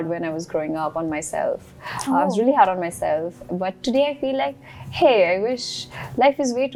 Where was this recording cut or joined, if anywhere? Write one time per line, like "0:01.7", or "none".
none